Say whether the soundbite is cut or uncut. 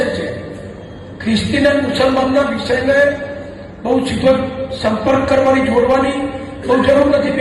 uncut